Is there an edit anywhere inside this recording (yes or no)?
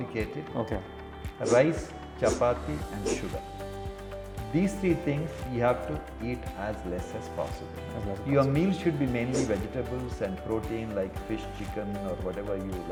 no